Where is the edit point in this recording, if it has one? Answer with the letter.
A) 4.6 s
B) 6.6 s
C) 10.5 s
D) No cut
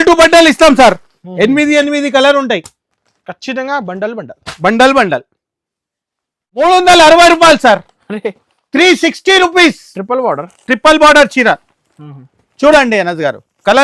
B